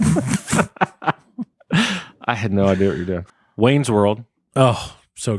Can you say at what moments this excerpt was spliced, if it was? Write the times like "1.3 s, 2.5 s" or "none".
3.4 s

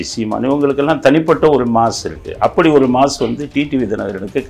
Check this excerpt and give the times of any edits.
none

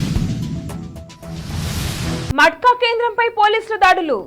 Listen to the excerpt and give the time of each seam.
2.3 s

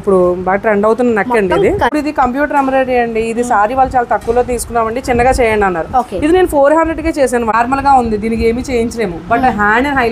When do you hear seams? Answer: 1.9 s, 7.5 s

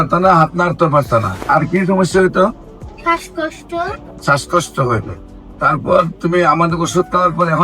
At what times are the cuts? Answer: 1.4 s, 4.1 s

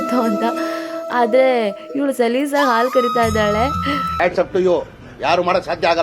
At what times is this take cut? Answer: 4.3 s

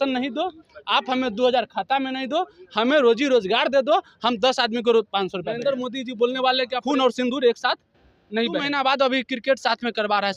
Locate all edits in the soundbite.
5.5 s, 6.8 s, 8.7 s

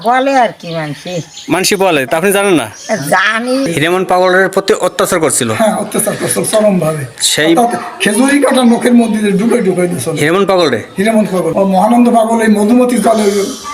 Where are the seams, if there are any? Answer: 3.7 s, 11.5 s

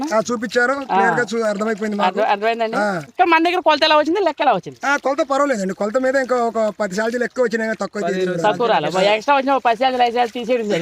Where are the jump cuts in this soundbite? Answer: 3.0 s

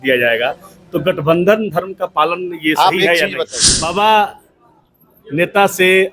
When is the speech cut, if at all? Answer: 3.4 s

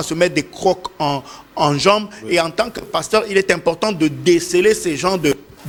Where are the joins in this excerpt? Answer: none

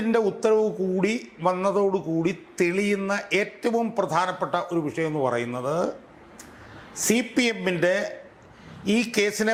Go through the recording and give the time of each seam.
none

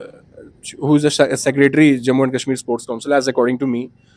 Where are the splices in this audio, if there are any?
none

